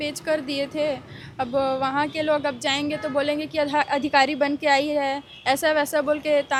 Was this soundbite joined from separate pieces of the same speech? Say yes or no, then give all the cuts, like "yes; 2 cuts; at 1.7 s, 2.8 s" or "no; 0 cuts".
no; 0 cuts